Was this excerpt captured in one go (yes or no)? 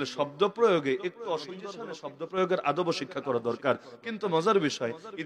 no